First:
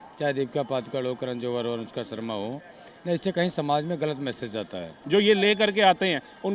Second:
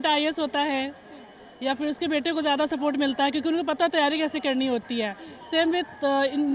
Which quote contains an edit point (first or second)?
first